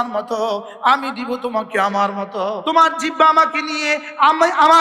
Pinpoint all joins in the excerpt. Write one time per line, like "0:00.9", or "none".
0:02.6